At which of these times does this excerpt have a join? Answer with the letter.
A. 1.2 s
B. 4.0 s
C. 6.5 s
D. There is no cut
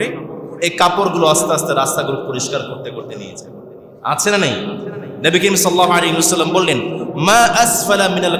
D